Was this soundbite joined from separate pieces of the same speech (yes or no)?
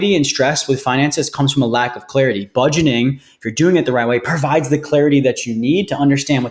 no